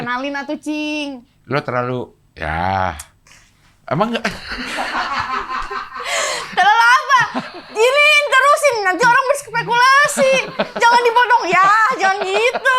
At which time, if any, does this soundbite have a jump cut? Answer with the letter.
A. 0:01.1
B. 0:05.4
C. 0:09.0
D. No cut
D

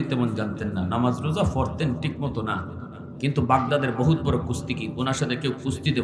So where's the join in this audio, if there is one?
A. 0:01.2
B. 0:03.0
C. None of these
B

